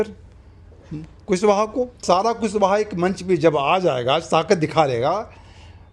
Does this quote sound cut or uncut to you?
cut